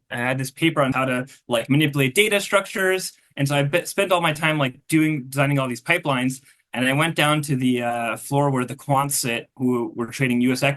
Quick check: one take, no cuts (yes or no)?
no